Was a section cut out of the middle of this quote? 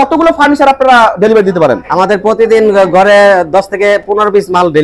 no; 0 cuts

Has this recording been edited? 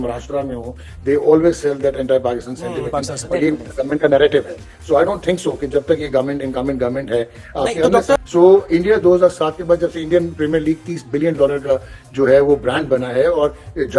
yes; 1 cut; at 8.2 s

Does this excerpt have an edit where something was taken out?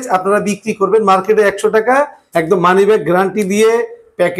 yes; 1 cut; at 2.2 s

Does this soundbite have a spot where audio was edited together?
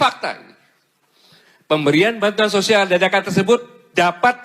yes; 1 cut; at 1.1 s

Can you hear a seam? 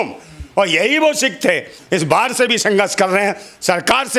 yes; 1 cut; at 1.7 s

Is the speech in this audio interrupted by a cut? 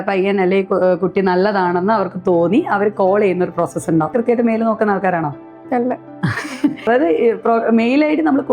yes; 2 cuts; at 4.1 s, 6.9 s

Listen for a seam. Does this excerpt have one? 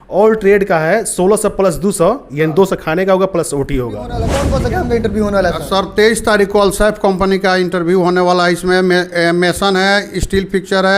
yes; 1 cut; at 4.3 s

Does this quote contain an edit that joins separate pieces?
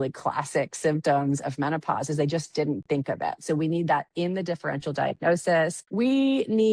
yes; 1 cut; at 5.8 s

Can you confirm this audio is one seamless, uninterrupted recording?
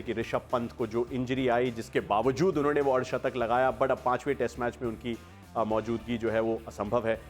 yes; 0 cuts

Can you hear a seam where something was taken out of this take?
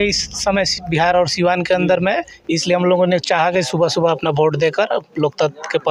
no; 0 cuts

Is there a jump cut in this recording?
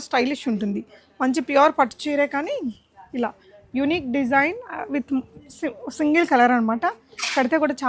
no; 0 cuts

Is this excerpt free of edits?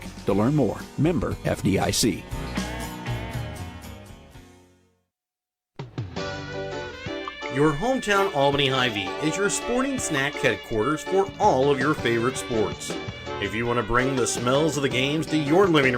no; 1 cut; at 5.8 s

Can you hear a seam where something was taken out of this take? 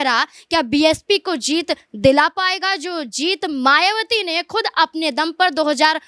no; 0 cuts

